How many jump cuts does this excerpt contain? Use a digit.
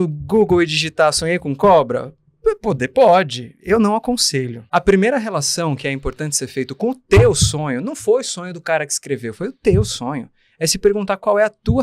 1